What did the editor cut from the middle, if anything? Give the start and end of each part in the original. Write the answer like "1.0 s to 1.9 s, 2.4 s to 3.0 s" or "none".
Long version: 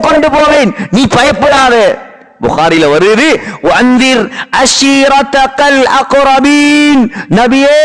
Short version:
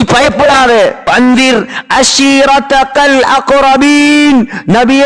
2.1 s to 3.7 s